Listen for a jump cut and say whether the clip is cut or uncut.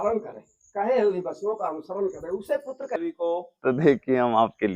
cut